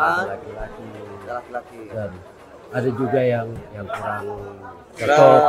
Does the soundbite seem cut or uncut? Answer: cut